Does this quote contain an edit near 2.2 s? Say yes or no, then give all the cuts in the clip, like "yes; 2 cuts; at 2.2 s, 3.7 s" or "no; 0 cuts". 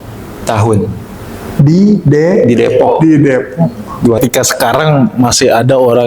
no; 1 cut; at 4.2 s